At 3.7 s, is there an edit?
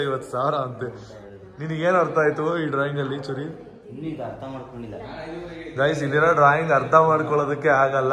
no; 0 cuts

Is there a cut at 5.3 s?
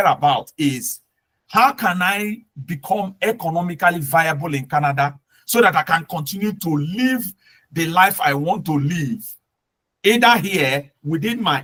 no; 0 cuts

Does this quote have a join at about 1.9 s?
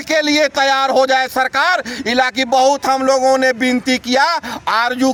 no; 0 cuts

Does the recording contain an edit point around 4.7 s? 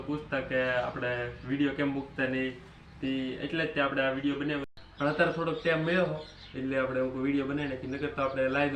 yes; 1 cut; at 4.7 s

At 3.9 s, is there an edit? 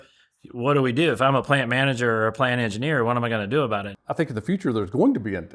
yes; 1 cut; at 3.9 s

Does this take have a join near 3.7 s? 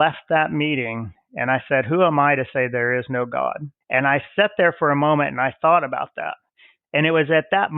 yes; 1 cut; at 3.7 s

